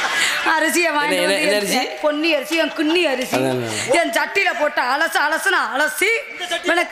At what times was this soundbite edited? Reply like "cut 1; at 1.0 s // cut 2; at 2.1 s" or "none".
none